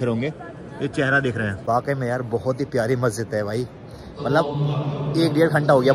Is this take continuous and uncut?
no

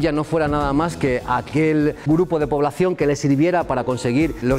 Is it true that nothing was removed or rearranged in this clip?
yes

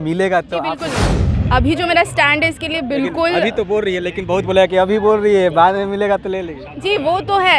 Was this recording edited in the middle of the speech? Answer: yes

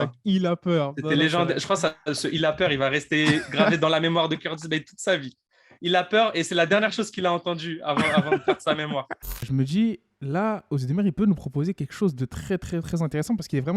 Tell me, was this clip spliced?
yes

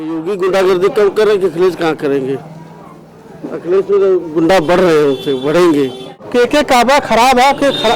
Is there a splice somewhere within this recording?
yes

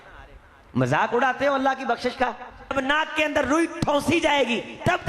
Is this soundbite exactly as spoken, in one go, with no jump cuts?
no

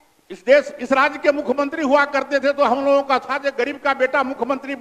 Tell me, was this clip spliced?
no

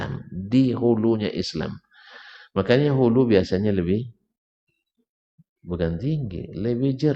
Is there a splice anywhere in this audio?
no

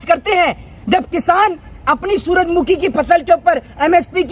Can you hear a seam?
no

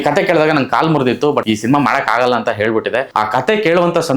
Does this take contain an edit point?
yes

